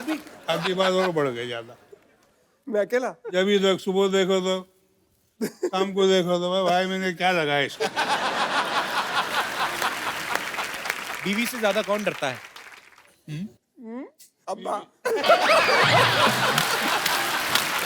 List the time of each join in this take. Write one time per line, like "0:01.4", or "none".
0:11.1